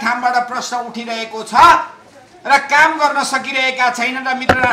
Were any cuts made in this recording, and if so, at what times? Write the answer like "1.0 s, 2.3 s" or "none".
none